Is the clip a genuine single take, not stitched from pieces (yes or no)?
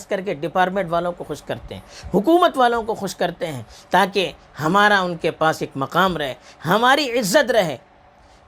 yes